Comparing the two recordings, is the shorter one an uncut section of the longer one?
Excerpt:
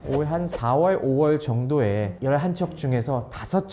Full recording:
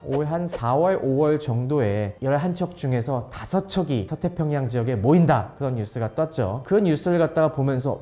yes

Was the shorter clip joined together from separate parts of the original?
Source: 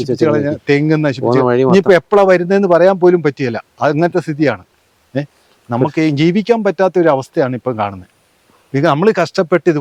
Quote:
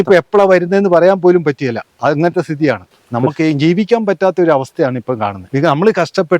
yes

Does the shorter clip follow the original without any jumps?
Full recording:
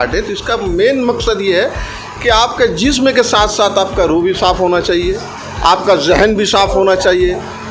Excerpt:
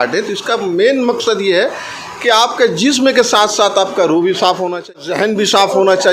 no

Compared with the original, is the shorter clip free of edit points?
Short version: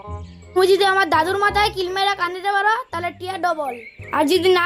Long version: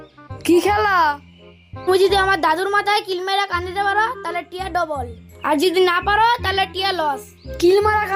yes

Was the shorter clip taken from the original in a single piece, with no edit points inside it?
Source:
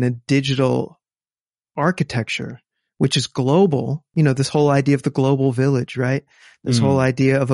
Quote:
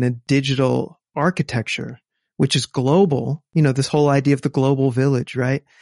no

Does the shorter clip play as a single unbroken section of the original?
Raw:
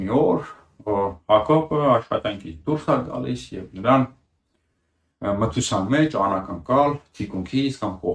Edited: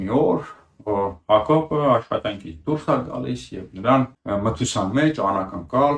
no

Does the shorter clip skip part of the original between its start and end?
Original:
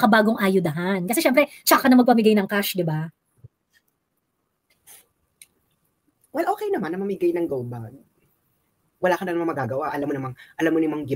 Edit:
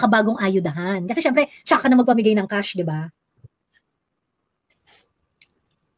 no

